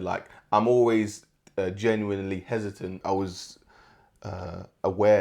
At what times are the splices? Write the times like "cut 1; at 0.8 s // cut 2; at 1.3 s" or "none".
cut 1; at 3.0 s